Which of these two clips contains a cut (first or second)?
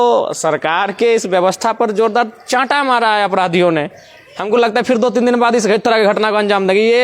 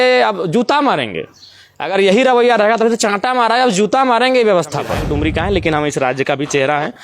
second